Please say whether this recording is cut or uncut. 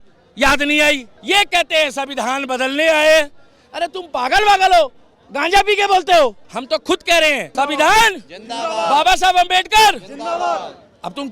cut